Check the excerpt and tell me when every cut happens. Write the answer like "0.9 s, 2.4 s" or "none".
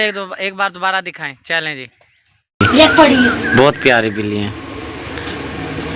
2.6 s